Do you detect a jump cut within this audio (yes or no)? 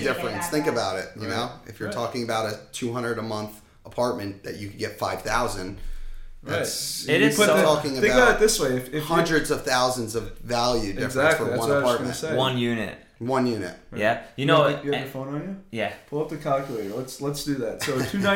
no